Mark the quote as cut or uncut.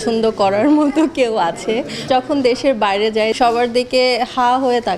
cut